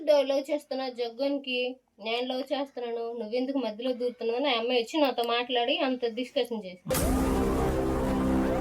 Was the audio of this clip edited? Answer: yes; 1 cut; at 6.9 s

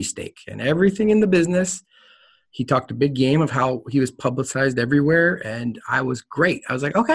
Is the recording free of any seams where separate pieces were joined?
yes; 0 cuts

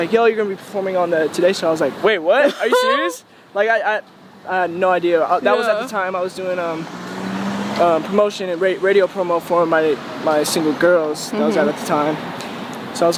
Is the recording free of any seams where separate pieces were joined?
yes; 0 cuts

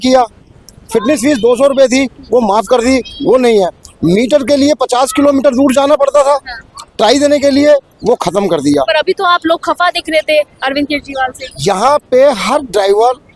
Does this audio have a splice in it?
no; 0 cuts

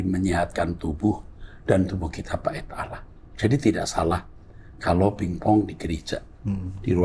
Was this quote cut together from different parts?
no; 0 cuts

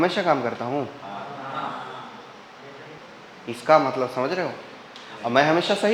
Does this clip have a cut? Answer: yes; 1 cut; at 3.0 s

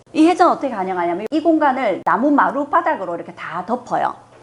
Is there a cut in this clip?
no; 0 cuts

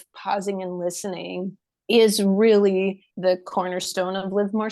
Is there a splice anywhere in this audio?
yes; 1 cut; at 3.1 s

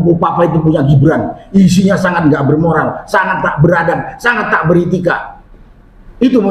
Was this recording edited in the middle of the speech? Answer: no; 0 cuts

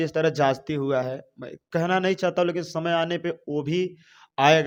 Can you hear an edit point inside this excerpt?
no; 0 cuts

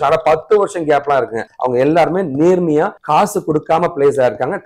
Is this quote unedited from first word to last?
yes; 0 cuts

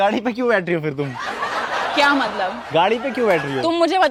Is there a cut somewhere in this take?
no; 0 cuts

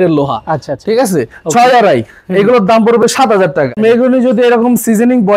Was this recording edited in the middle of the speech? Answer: yes; 1 cut; at 3.8 s

